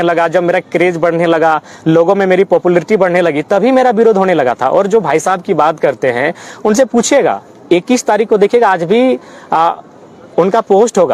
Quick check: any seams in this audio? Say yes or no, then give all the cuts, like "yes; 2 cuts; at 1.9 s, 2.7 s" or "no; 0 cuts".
no; 0 cuts